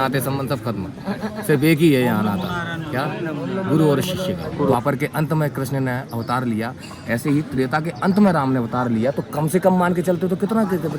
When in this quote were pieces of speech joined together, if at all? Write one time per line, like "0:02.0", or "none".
0:04.7